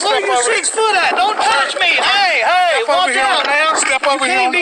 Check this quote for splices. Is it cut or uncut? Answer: uncut